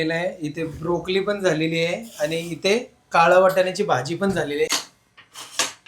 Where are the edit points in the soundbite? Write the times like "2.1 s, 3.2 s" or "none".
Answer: 4.7 s